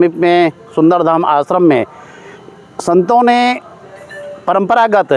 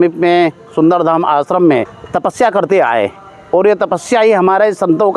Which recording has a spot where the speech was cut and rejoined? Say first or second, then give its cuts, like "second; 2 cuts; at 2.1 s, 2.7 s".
second; 1 cut; at 2.0 s